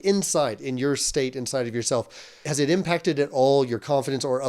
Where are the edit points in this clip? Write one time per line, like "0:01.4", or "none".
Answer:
0:02.4